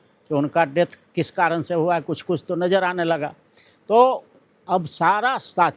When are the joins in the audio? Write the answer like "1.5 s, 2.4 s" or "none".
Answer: none